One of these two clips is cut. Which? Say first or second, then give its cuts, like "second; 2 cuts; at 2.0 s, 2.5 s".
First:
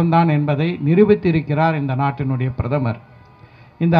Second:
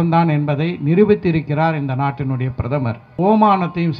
second; 1 cut; at 3.0 s